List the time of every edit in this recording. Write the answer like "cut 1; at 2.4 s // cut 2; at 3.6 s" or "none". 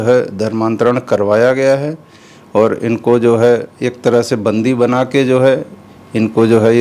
none